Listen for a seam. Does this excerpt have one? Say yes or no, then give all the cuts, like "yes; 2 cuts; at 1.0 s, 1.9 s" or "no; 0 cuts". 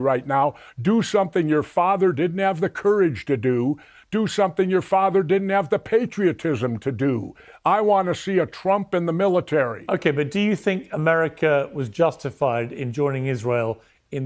yes; 1 cut; at 9.8 s